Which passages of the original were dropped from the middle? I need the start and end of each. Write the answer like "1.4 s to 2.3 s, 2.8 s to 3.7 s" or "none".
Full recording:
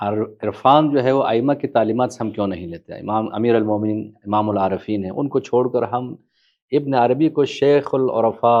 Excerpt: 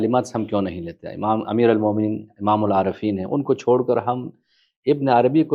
none